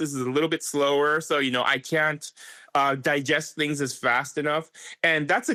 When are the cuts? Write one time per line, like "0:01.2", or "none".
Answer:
none